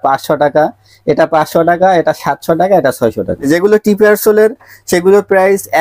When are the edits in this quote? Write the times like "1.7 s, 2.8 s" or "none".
3.5 s